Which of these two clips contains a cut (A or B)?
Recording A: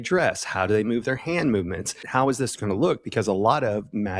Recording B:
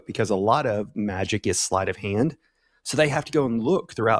A